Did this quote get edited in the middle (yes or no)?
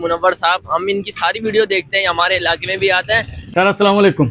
yes